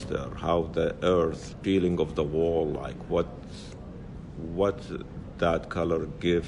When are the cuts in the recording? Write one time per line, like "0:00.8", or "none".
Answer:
none